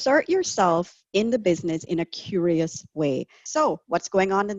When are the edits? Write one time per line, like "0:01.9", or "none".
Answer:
0:03.4